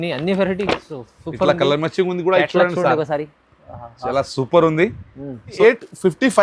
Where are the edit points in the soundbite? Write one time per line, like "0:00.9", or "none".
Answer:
0:05.5